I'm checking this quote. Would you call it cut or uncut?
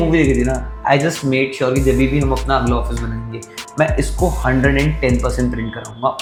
uncut